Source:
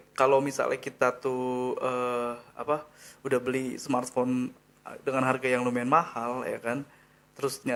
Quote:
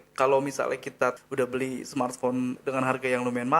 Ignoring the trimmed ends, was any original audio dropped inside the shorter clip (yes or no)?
yes